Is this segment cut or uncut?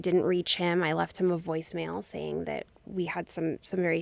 uncut